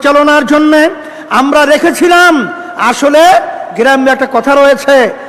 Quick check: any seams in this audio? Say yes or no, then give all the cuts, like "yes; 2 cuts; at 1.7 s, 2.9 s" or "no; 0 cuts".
no; 0 cuts